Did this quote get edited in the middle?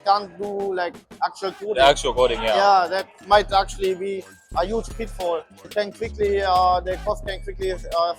yes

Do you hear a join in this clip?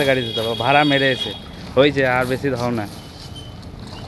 no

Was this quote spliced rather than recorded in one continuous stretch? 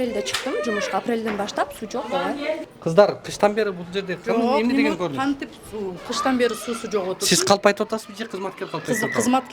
yes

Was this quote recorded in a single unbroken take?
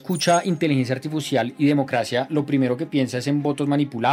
yes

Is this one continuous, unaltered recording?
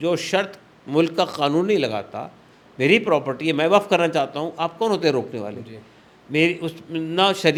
yes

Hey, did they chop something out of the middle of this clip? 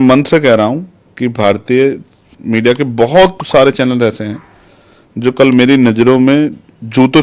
no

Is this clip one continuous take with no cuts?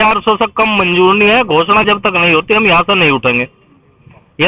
yes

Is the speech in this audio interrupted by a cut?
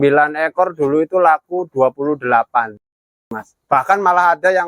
yes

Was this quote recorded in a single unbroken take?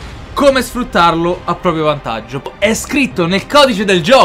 no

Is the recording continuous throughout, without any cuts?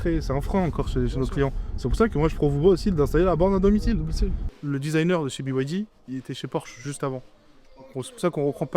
no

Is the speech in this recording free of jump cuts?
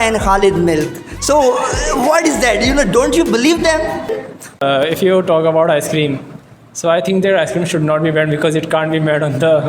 no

